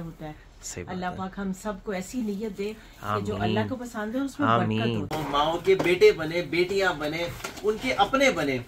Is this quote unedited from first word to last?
no; 1 cut; at 5.1 s

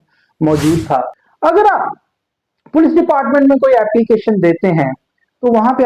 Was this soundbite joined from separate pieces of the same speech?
yes; 1 cut; at 1.2 s

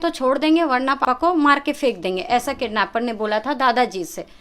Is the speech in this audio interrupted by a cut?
yes; 1 cut; at 1.0 s

